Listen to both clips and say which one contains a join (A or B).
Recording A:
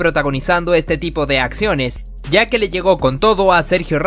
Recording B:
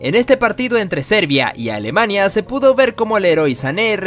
A